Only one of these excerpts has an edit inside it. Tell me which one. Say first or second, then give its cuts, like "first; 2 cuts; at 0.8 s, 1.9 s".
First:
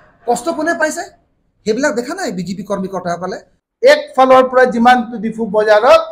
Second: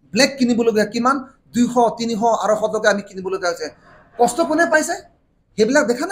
first; 1 cut; at 3.6 s